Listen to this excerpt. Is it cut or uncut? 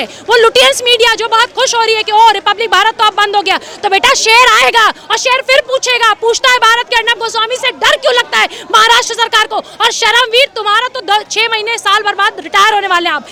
uncut